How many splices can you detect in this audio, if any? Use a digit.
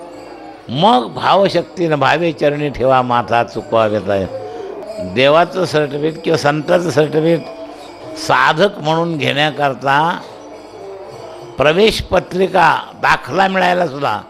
1